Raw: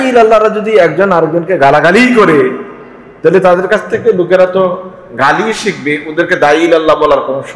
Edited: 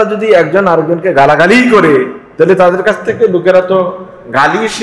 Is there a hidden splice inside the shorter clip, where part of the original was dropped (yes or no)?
yes